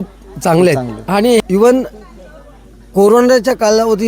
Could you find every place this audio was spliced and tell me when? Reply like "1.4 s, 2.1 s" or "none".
1.4 s